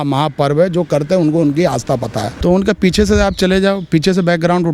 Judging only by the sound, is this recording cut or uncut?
cut